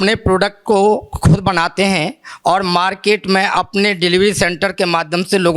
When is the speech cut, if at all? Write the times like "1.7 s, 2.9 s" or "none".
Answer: none

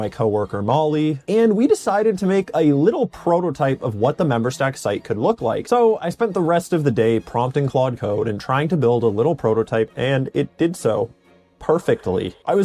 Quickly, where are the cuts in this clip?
1.2 s, 5.6 s, 9.9 s

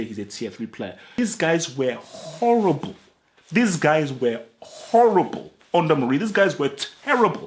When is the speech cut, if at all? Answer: 1.1 s

